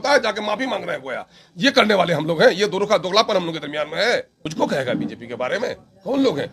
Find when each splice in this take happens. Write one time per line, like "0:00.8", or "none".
0:04.4